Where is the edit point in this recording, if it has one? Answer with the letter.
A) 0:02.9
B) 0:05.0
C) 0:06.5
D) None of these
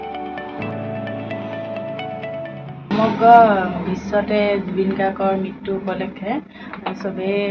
A